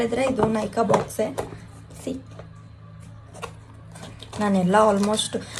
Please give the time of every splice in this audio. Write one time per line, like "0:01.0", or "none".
none